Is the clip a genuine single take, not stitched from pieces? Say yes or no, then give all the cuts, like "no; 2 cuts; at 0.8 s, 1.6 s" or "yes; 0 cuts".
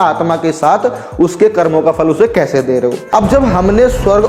no; 1 cut; at 3.0 s